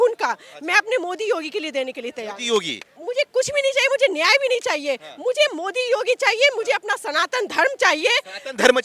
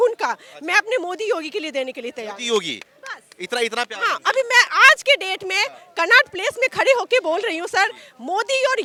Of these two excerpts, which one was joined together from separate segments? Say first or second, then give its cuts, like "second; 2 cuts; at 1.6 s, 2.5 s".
first; 1 cut; at 2.9 s